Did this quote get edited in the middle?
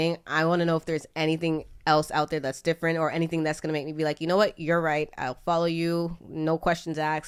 no; 0 cuts

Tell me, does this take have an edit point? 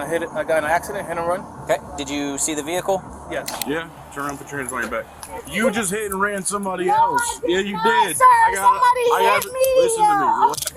yes; 2 cuts; at 3.5 s, 5.4 s

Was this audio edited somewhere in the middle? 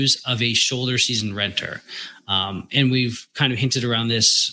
no; 0 cuts

